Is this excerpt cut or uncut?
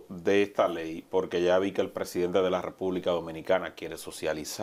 uncut